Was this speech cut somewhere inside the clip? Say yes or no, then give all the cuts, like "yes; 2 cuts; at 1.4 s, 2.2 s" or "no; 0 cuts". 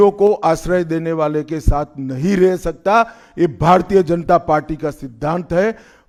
no; 0 cuts